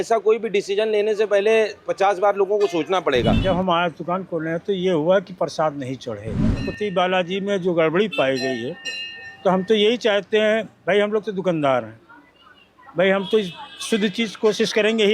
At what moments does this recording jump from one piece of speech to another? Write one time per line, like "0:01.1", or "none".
0:03.4
0:06.5